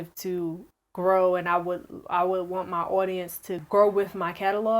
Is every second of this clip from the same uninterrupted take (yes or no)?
no